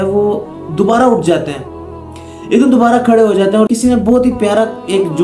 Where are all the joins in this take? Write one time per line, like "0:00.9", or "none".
0:03.7